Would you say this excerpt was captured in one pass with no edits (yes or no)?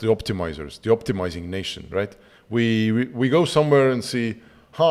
yes